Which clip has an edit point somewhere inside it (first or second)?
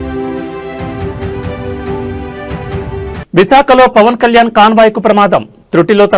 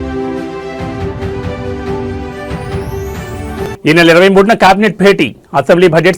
second